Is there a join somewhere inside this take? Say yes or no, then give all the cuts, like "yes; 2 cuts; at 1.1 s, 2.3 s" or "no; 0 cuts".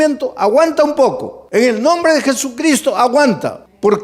no; 0 cuts